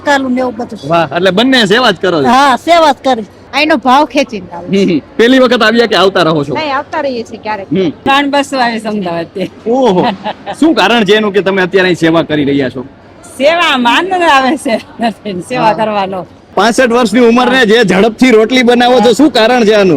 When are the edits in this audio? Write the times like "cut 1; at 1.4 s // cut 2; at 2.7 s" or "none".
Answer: cut 1; at 3.4 s // cut 2; at 8.1 s // cut 3; at 16.5 s